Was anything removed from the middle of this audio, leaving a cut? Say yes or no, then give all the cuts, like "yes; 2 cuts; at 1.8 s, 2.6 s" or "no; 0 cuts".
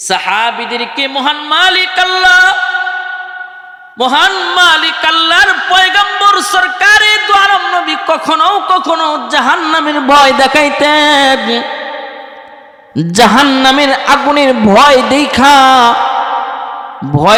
no; 0 cuts